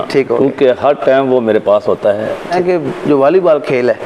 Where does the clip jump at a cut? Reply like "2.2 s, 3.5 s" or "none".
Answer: 2.5 s